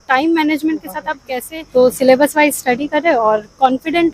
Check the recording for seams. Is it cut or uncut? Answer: cut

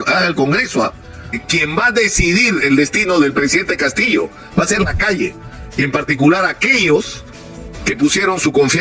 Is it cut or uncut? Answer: cut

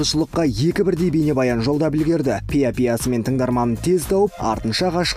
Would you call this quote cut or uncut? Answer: uncut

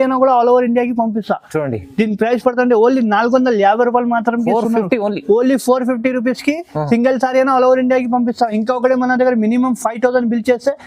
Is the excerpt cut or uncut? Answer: uncut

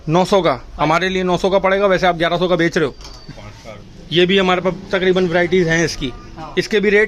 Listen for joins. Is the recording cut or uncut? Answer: cut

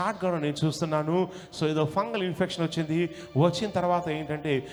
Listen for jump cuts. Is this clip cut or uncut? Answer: uncut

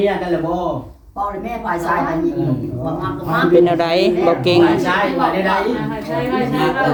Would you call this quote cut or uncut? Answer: uncut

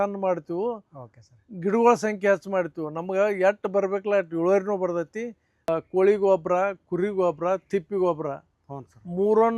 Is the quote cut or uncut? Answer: cut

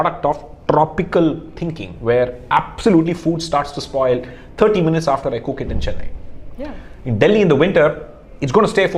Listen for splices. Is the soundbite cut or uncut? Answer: uncut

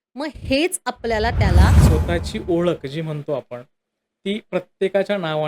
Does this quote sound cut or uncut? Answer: cut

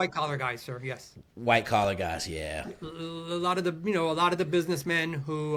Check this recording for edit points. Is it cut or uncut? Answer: uncut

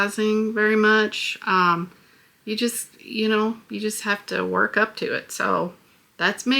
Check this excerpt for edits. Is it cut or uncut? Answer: uncut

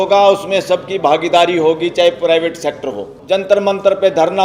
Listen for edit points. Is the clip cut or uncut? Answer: cut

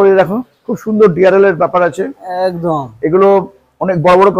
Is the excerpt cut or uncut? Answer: uncut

